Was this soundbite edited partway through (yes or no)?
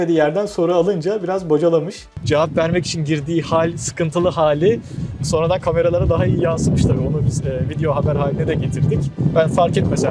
no